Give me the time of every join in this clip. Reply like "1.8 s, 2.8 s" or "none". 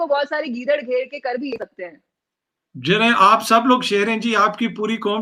none